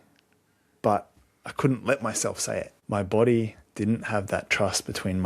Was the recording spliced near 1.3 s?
no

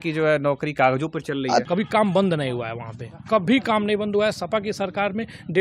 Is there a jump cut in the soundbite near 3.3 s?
no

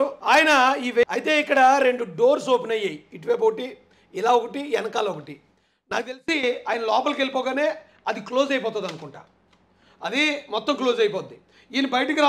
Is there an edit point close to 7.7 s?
no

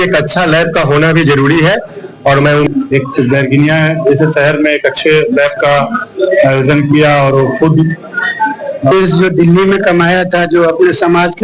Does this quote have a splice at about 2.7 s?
yes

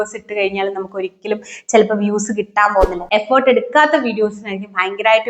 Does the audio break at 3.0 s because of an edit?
yes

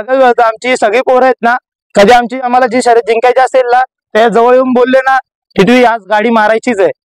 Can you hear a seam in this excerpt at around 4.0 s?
no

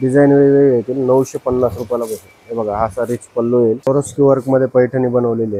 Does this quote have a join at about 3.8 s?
yes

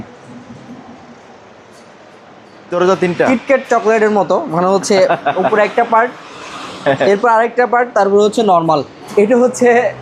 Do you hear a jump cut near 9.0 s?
yes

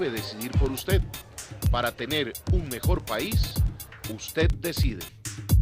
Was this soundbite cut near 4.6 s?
yes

